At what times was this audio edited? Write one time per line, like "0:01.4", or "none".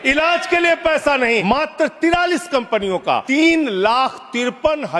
0:01.4
0:03.2